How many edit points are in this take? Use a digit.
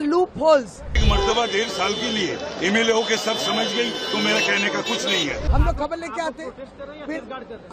2